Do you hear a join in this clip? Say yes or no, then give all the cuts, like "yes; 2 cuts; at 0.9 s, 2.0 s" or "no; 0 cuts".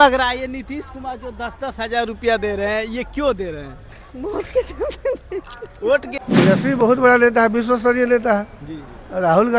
yes; 1 cut; at 6.2 s